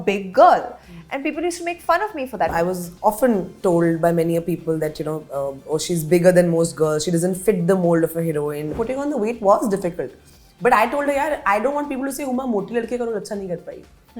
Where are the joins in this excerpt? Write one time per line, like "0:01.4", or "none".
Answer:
0:02.5
0:08.7